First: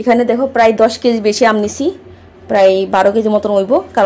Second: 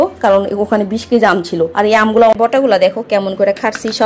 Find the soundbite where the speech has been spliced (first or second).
second